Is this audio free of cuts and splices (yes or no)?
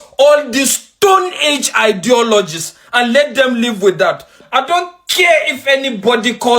no